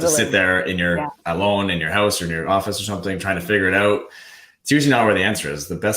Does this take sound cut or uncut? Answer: cut